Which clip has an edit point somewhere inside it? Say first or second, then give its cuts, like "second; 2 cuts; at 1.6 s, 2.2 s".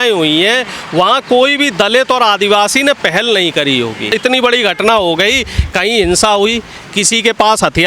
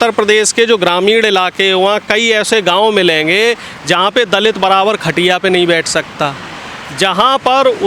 first; 1 cut; at 4.1 s